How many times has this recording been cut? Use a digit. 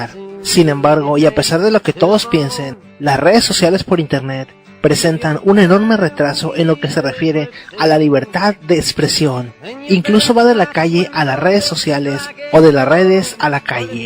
1